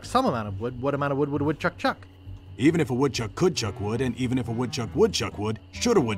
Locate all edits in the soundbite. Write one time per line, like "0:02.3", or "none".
none